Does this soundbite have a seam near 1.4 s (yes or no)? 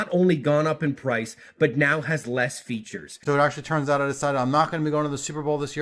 no